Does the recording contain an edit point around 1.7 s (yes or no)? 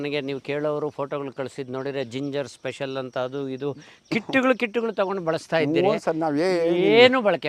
no